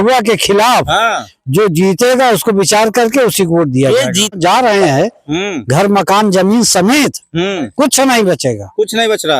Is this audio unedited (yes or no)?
no